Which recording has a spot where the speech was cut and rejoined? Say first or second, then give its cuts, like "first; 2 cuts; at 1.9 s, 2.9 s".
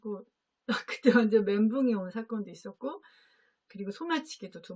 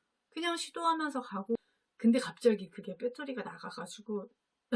second; 1 cut; at 1.6 s